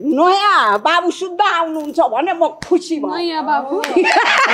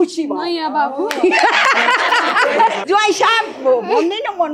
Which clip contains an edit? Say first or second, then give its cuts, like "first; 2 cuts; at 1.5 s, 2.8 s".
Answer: second; 1 cut; at 2.8 s